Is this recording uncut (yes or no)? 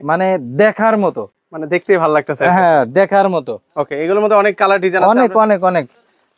yes